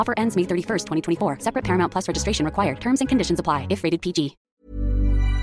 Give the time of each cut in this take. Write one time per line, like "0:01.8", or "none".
0:04.5